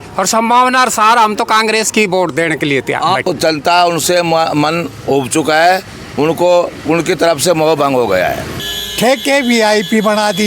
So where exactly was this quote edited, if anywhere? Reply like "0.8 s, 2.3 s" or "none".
3.3 s, 8.6 s